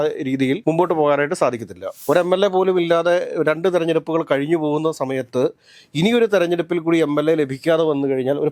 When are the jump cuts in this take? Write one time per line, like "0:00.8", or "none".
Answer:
0:01.9